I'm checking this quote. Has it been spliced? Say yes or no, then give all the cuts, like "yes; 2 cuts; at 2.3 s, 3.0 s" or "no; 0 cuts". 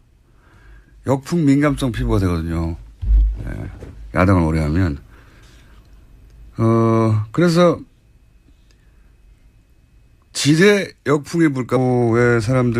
no; 0 cuts